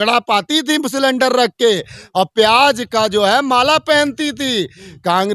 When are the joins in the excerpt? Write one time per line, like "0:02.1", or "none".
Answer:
none